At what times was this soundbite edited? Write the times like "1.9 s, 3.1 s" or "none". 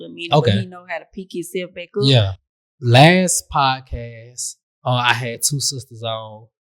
2.4 s